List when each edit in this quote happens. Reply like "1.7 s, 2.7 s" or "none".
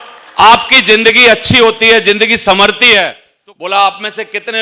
3.2 s